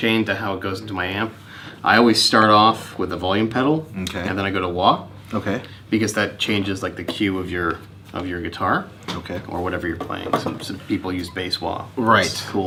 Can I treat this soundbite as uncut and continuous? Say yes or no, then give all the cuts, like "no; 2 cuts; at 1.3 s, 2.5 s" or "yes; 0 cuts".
yes; 0 cuts